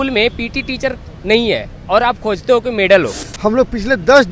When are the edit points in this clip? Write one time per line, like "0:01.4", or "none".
0:03.2